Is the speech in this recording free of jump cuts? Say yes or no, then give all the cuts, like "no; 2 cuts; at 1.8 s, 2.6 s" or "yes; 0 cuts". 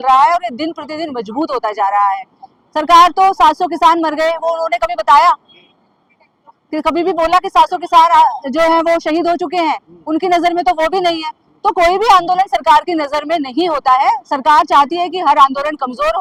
yes; 0 cuts